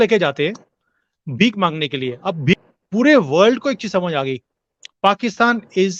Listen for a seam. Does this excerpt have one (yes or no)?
yes